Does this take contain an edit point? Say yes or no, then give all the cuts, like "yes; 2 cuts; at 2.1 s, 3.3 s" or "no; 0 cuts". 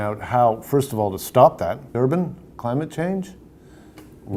no; 0 cuts